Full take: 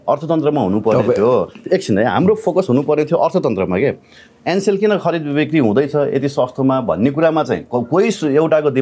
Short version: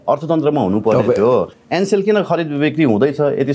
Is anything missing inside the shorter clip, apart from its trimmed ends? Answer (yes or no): yes